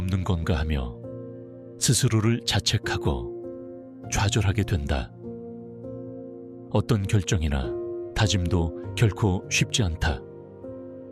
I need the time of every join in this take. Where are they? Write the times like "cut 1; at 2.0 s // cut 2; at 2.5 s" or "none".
cut 1; at 10.2 s